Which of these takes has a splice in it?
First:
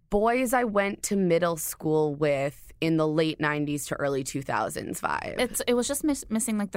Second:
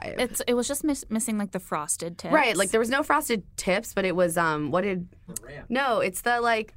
second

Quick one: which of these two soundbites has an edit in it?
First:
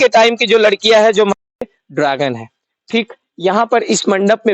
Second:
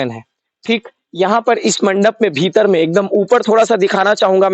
first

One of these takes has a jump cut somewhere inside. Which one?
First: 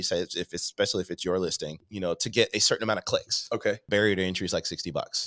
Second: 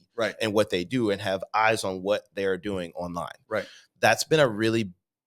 first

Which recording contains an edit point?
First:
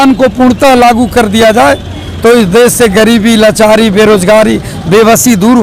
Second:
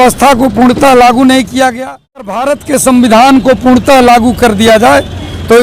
second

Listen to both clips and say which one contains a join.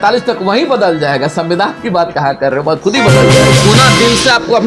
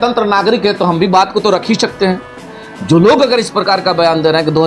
first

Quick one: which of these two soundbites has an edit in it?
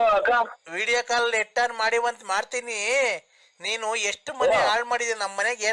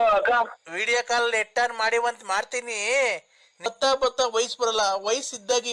second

